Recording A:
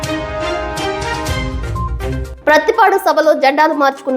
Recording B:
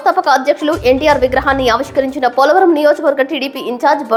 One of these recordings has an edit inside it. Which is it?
A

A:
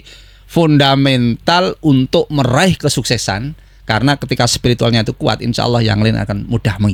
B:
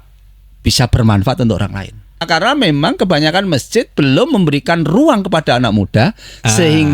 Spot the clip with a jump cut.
B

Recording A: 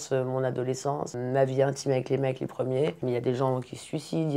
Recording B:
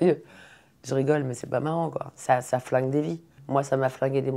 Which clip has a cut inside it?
B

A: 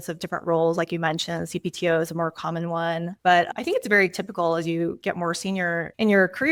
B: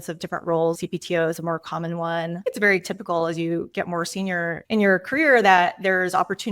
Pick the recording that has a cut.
B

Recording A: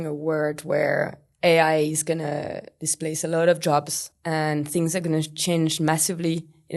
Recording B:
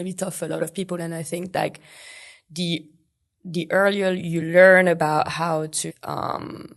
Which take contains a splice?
B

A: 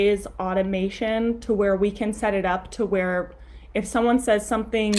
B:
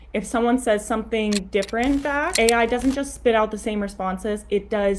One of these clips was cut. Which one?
B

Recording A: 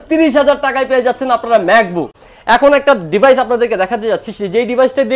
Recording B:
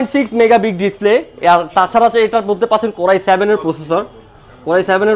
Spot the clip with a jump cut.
A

